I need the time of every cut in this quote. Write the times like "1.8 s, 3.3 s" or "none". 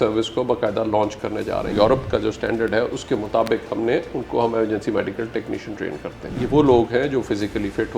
1.7 s, 6.3 s